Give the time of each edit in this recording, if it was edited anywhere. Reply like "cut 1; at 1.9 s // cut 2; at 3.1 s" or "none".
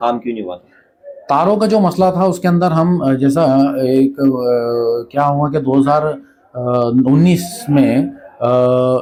none